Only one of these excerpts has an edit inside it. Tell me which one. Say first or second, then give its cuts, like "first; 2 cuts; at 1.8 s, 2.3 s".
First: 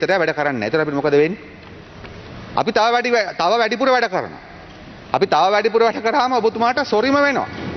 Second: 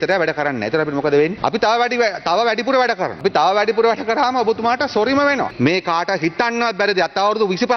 second; 3 cuts; at 1.4 s, 3.2 s, 5.5 s